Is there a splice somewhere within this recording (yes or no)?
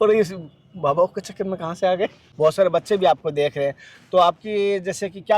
yes